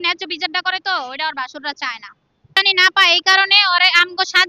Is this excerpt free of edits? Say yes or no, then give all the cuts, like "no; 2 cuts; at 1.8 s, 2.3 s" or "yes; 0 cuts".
no; 1 cut; at 2.5 s